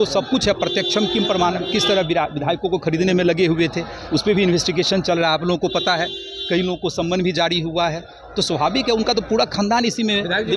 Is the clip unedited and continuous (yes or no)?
yes